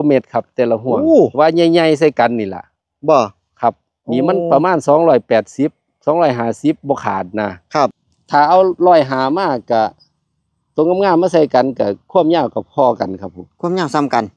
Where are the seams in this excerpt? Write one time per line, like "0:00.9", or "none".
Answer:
0:08.1